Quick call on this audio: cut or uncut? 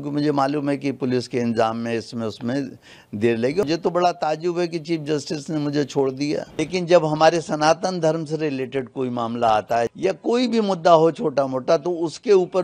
cut